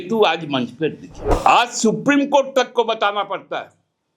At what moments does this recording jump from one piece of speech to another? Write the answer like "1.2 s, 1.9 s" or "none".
1.4 s